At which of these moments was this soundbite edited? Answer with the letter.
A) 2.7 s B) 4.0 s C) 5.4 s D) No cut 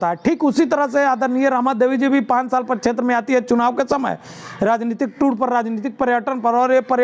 D